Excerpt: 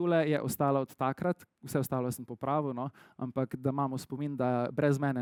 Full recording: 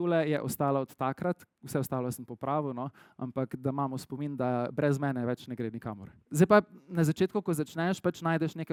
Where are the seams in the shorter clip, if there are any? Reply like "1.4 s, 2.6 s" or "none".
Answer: none

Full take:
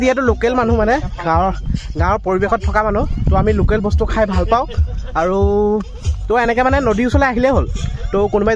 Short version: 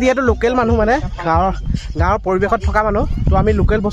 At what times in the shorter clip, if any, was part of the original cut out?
none

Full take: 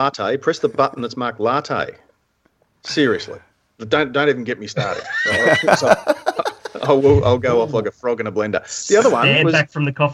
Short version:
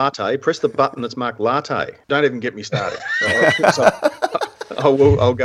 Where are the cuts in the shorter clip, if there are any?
2.1 s

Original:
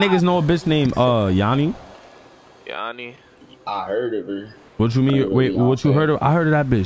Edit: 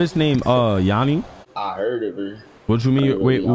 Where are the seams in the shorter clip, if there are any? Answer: 1.4 s

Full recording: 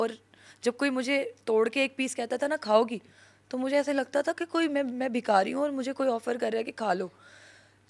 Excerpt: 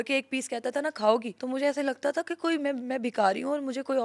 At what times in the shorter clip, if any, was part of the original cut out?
1.4 s

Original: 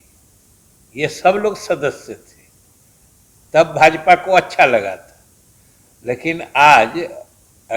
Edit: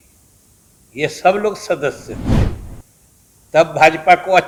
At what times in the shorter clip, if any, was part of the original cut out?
none

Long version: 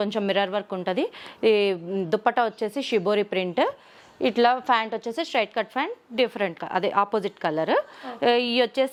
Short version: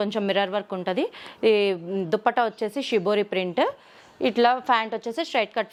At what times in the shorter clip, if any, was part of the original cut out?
none

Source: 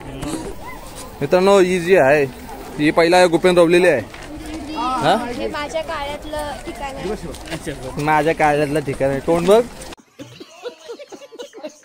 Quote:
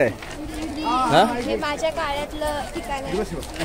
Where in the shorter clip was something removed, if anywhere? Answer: none

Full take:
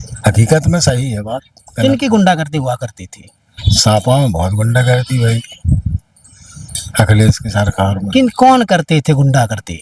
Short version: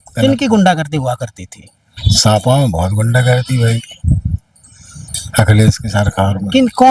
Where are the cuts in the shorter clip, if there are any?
none

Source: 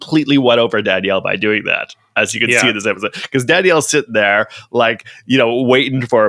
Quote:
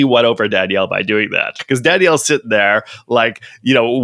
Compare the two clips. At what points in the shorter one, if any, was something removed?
1.6 s

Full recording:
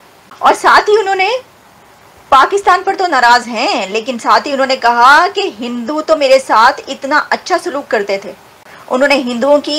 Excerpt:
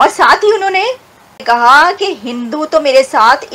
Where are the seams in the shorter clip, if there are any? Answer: 1.4 s

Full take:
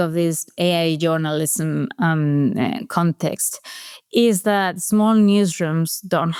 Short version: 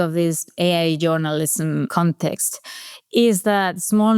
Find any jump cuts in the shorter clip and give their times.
1.9 s

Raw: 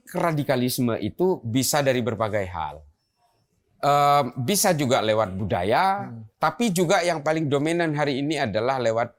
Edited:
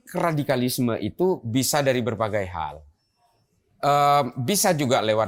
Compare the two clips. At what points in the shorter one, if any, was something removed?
none

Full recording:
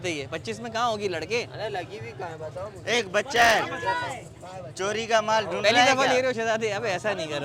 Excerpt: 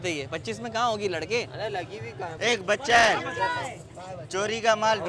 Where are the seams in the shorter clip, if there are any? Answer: 2.3 s

